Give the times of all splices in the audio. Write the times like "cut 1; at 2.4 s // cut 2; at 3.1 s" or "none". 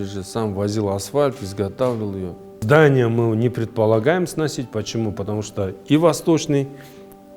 cut 1; at 2.6 s